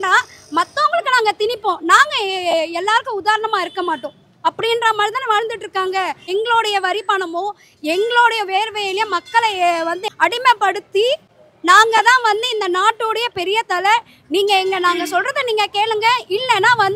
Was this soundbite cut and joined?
yes; 2 cuts; at 6.3 s, 10.0 s

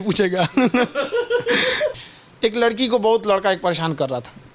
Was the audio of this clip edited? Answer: yes; 1 cut; at 2.0 s

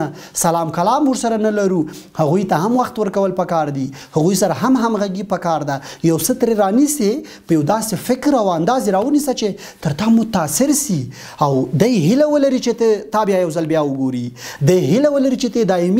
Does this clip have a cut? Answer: no; 0 cuts

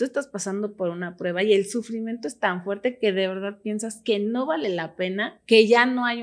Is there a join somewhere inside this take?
yes; 1 cut; at 5.3 s

